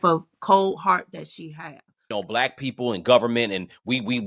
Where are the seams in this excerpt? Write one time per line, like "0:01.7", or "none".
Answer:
0:02.1